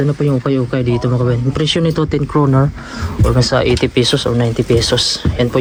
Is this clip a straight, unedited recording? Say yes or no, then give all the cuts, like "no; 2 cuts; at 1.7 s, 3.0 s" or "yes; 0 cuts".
yes; 0 cuts